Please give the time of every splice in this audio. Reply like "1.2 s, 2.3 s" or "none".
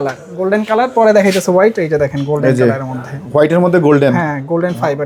none